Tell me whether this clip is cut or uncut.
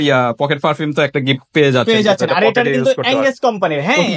uncut